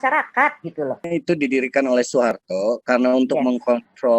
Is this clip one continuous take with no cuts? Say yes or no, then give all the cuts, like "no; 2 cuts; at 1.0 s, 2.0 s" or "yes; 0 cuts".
no; 1 cut; at 1.0 s